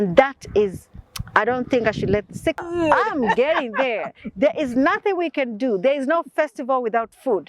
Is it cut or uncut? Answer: cut